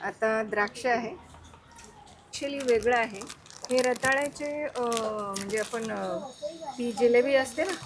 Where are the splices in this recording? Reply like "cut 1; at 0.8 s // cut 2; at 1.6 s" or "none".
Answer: cut 1; at 2.4 s